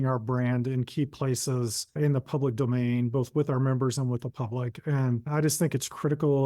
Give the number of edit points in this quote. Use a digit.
2